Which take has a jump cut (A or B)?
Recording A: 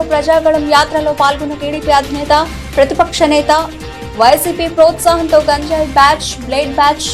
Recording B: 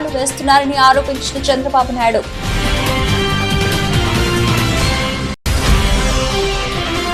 B